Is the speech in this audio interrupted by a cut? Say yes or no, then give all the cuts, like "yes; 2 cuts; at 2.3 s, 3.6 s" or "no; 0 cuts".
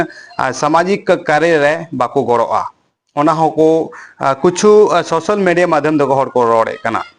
no; 0 cuts